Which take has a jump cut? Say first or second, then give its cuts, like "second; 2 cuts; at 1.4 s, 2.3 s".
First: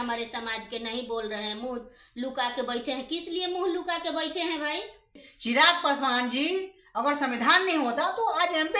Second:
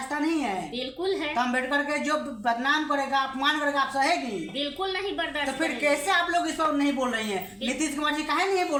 first; 1 cut; at 5.3 s